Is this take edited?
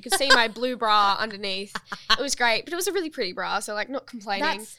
no; 0 cuts

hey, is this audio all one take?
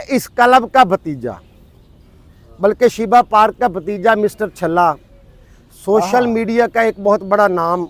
yes; 0 cuts

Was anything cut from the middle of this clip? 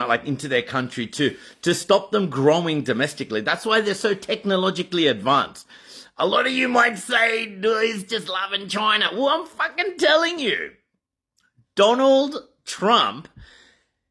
no; 0 cuts

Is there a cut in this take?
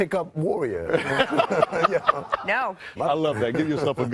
yes; 1 cut; at 1.4 s

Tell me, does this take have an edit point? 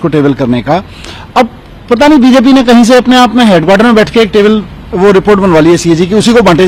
no; 0 cuts

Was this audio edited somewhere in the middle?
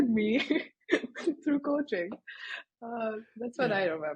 no; 0 cuts

